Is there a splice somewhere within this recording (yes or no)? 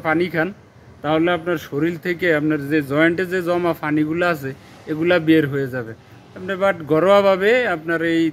no